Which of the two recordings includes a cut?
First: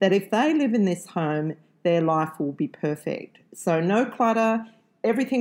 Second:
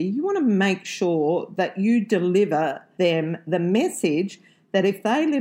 second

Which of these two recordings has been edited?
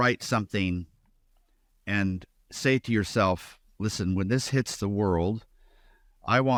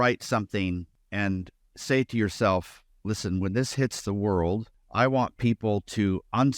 second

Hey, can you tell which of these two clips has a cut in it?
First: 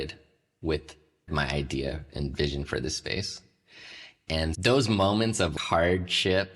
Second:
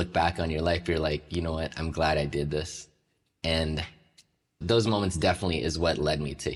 first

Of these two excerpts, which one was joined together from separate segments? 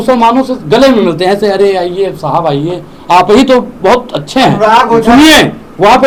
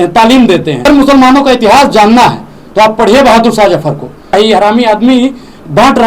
second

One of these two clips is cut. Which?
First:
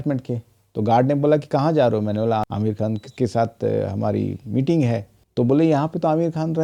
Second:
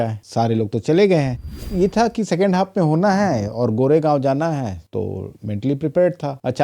second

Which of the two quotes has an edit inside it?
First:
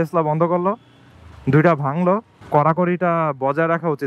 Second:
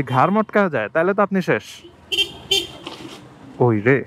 first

